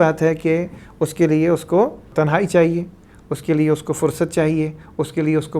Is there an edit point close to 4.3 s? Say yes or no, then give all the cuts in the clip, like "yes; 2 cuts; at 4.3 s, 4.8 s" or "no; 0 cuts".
no; 1 cut; at 2.1 s